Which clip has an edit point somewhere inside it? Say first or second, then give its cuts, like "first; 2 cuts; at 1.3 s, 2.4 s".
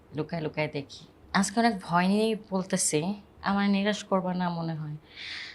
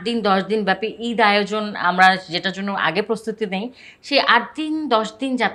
first; 1 cut; at 3.3 s